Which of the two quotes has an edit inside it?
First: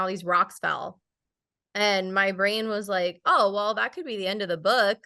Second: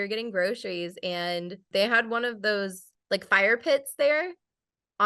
second; 1 cut; at 1.6 s

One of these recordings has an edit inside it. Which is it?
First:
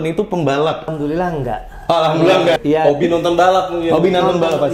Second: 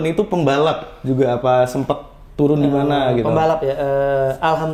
first; 2 cuts; at 0.9 s, 2.6 s

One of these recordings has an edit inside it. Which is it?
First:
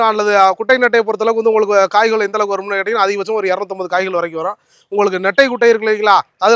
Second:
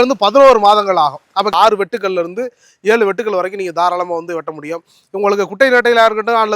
second; 1 cut; at 1.5 s

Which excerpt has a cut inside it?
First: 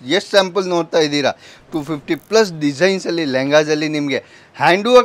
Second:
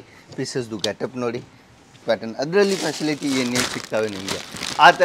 second; 1 cut; at 2.0 s

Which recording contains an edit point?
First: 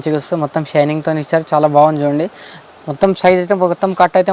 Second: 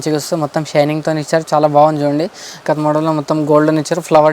second; 1 cut; at 2.6 s

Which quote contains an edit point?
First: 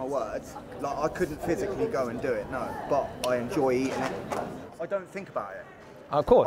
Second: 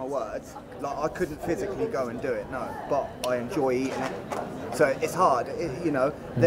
first; 1 cut; at 4.6 s

